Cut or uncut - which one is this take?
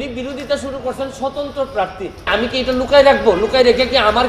cut